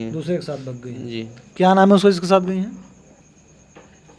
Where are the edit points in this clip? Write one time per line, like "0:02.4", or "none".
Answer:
0:03.2